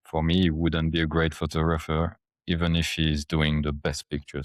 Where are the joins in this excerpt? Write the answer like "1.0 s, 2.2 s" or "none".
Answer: none